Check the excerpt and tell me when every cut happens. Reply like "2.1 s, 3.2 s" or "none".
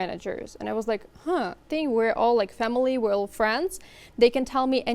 1.7 s